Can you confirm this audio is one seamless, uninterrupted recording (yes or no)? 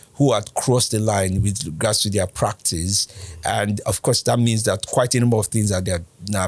yes